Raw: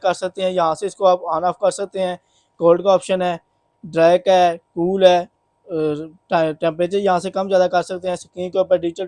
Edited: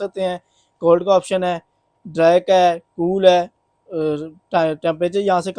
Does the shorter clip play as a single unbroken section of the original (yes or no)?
yes